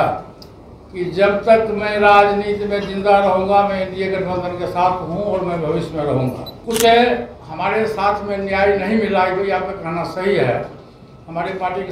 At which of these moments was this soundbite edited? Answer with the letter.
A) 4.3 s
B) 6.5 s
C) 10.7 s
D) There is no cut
B